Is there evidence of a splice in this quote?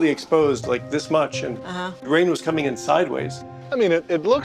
yes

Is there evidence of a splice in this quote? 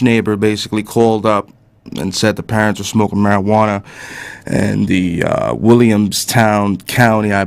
no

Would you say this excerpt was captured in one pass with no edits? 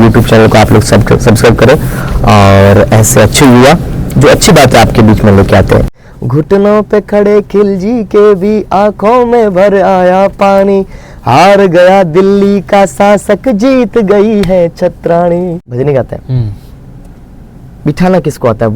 no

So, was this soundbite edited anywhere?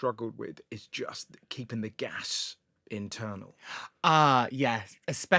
no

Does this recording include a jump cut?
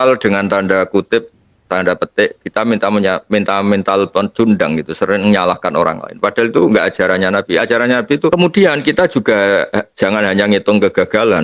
yes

